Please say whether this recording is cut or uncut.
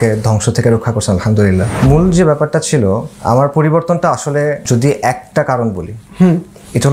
cut